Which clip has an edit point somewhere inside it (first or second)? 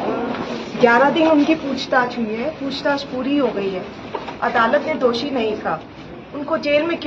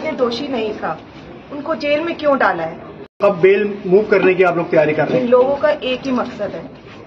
second